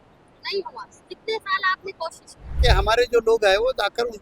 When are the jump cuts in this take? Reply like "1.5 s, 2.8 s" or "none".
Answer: 2.6 s